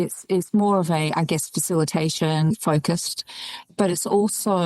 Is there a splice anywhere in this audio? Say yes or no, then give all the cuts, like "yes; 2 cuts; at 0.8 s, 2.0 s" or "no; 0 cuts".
yes; 1 cut; at 3.7 s